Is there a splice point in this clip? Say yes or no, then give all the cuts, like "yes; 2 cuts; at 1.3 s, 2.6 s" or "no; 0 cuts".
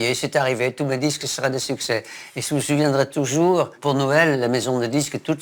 no; 0 cuts